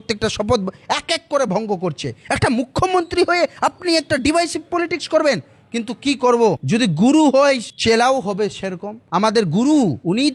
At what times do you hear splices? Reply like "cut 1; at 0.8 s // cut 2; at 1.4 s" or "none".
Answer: none